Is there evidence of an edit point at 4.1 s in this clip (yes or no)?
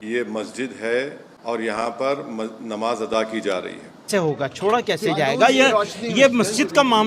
yes